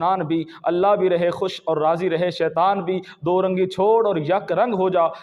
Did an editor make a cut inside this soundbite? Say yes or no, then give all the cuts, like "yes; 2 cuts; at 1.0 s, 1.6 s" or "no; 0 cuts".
no; 0 cuts